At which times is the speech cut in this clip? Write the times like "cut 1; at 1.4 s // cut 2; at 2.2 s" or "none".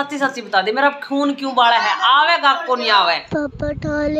cut 1; at 3.2 s